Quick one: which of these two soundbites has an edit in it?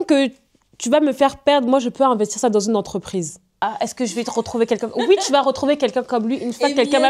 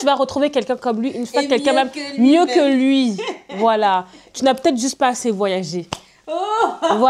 first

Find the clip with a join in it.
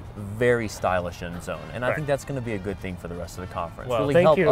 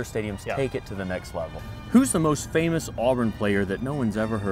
second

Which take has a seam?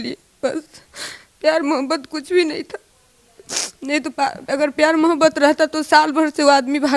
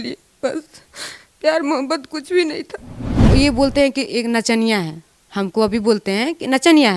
second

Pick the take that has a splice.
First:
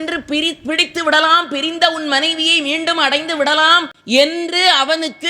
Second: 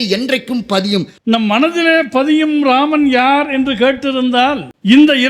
second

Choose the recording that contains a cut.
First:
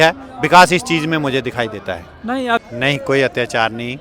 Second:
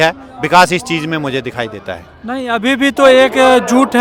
first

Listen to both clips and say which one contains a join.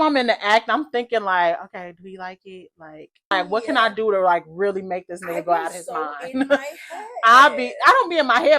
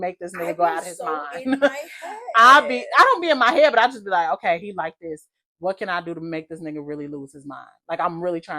first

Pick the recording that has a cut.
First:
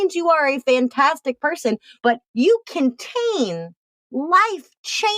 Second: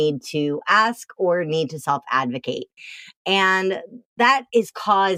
first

